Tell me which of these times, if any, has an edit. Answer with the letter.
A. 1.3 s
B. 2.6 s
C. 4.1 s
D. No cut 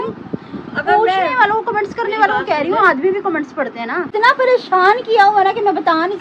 C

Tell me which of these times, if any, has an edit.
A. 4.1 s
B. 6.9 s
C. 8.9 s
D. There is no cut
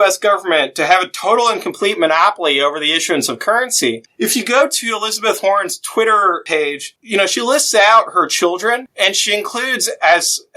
A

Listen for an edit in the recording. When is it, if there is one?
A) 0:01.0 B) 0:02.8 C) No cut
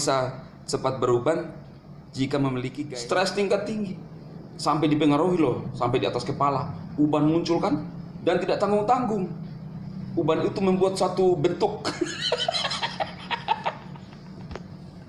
B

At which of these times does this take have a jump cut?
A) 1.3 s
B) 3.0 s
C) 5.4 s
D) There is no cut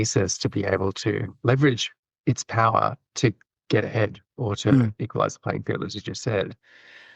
A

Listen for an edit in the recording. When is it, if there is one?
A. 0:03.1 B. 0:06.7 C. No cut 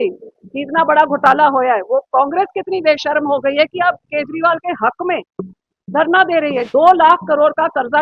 B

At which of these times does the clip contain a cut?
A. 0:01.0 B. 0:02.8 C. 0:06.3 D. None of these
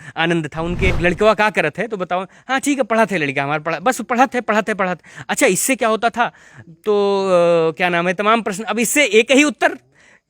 A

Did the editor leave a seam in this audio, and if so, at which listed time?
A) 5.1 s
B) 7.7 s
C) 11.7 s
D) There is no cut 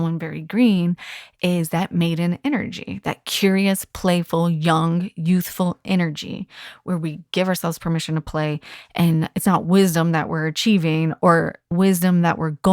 C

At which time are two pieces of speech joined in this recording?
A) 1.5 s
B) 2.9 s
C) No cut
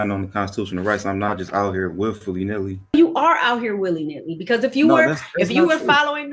B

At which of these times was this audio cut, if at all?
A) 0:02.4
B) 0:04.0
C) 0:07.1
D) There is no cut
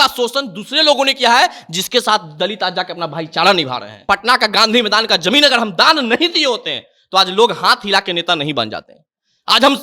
B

